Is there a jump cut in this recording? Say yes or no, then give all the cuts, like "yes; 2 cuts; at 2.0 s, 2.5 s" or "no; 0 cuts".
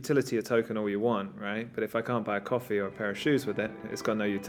no; 0 cuts